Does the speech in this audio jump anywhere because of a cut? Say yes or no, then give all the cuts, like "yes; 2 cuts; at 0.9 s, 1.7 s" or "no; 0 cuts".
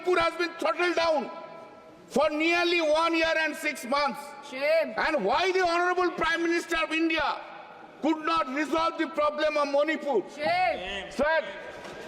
no; 0 cuts